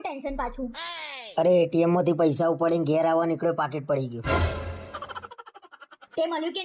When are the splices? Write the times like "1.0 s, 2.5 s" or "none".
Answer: none